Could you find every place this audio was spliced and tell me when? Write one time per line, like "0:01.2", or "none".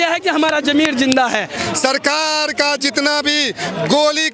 0:01.6